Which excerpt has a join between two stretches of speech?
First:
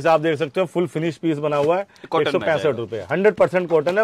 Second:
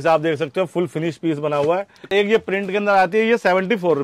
second; 1 cut; at 2.1 s

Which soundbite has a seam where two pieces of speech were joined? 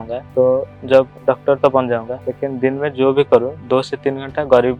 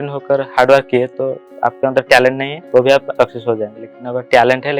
second; 3 cuts; at 1.4 s, 2.5 s, 3.1 s

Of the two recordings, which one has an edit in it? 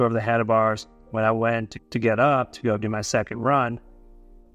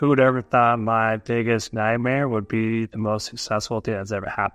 first; 1 cut; at 1.5 s

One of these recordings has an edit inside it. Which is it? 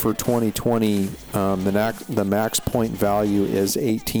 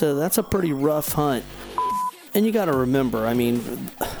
second; 1 cut; at 2.0 s

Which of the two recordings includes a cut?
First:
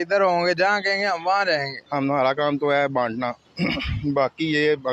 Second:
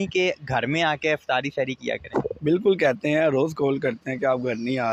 first; 1 cut; at 1.8 s

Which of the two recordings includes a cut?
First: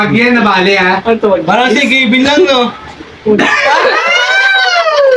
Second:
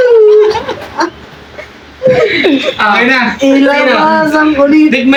first; 1 cut; at 3.3 s

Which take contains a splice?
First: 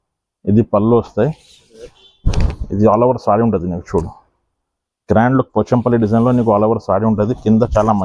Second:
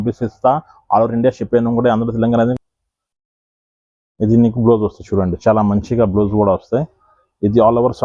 second; 1 cut; at 2.6 s

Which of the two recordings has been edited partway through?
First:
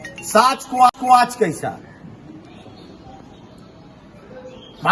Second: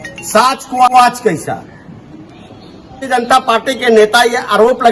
second; 2 cuts; at 0.9 s, 3.1 s

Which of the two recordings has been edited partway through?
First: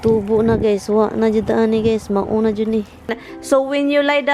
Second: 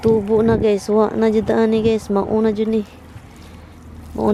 first; 1 cut; at 3.3 s

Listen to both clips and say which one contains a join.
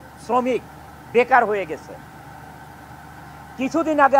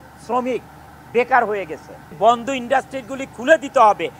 second; 1 cut; at 2.2 s

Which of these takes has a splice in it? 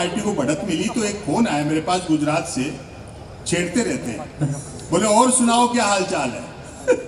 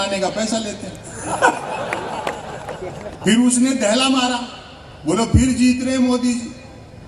second; 1 cut; at 3.1 s

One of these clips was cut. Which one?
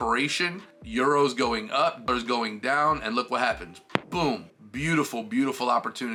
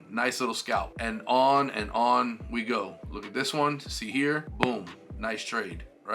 second; 2 cuts; at 0.9 s, 4.5 s

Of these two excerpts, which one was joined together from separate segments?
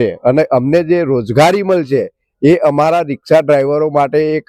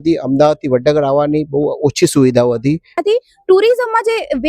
second; 1 cut; at 3.0 s

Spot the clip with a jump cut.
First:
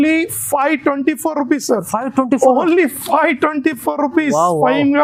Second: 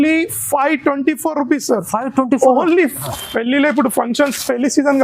second; 1 cut; at 3.0 s

